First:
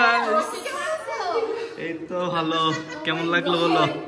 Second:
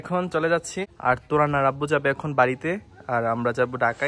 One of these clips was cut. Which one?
second; 1 cut; at 0.9 s

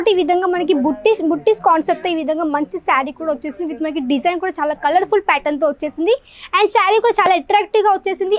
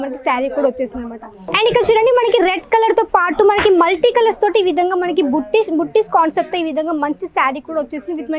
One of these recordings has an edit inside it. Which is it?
second; 1 cut; at 1.4 s

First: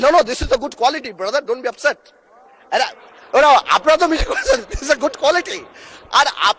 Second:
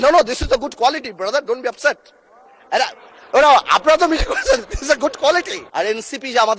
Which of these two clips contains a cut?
second; 1 cut; at 5.6 s

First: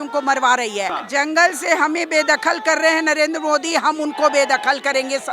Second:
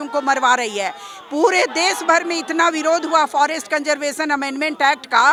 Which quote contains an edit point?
first; 1 cut; at 1.0 s

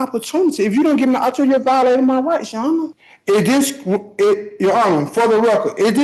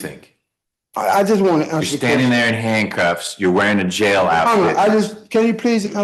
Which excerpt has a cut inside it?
first; 1 cut; at 3.0 s

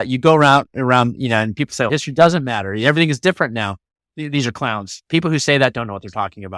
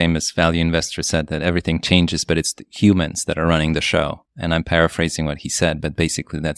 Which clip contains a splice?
first; 1 cut; at 1.9 s

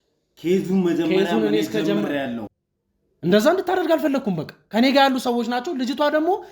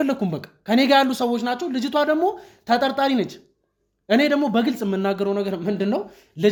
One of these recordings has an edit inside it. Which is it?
first; 1 cut; at 2.6 s

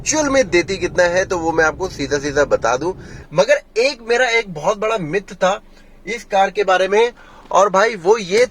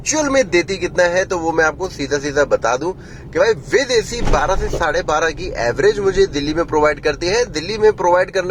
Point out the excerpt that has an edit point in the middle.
first; 1 cut; at 3.1 s

